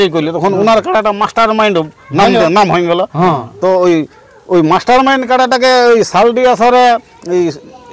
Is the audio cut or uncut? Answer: uncut